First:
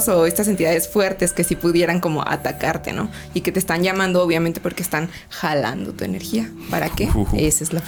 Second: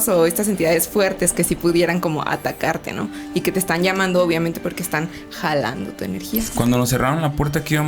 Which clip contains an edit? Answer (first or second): second